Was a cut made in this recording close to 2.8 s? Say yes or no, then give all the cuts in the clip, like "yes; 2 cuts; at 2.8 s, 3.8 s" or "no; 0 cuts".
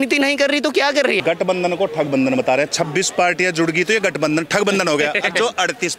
no; 1 cut; at 1.2 s